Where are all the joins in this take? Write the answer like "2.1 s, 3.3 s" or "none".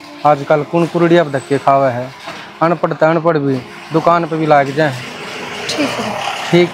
none

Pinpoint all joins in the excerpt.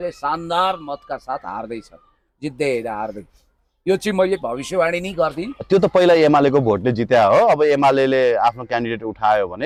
none

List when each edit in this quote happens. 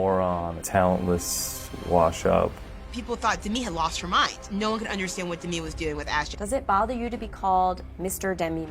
2.6 s, 6.3 s

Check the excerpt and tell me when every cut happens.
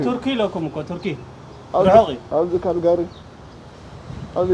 none

